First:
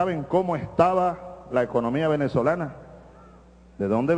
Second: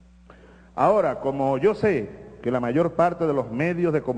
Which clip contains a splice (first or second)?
second